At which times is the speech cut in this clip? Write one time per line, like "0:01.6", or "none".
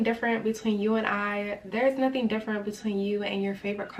none